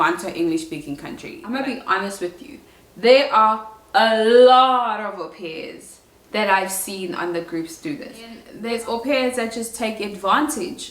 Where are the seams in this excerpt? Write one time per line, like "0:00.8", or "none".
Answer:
0:01.3
0:08.5